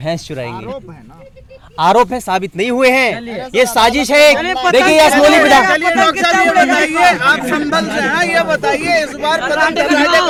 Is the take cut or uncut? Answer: uncut